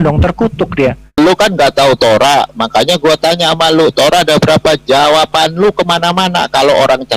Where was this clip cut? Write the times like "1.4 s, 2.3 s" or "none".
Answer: 1.2 s